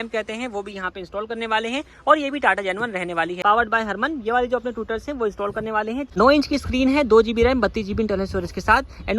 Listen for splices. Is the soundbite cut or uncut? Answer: cut